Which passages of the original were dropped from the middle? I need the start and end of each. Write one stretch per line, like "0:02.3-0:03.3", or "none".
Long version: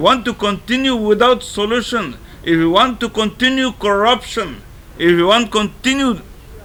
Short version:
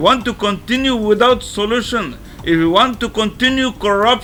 none